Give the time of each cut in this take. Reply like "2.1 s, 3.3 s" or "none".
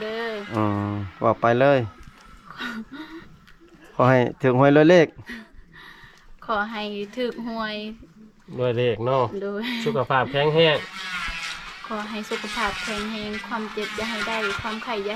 none